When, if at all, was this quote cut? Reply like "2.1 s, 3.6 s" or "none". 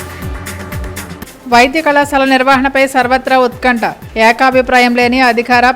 1.1 s